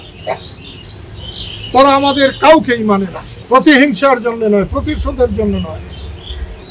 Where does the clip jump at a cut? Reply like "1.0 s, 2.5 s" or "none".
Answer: 3.4 s